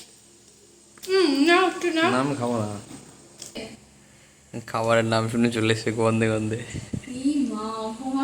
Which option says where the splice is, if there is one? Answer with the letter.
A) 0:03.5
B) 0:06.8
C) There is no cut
A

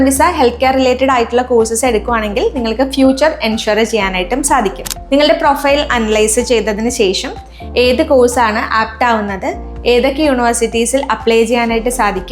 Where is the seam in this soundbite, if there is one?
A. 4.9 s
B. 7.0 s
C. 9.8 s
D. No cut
A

